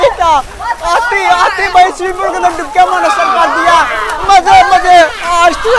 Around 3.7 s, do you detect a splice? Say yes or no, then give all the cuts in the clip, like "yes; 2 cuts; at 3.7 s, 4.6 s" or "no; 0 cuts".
no; 0 cuts